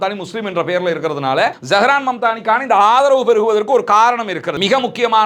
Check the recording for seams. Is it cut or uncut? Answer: cut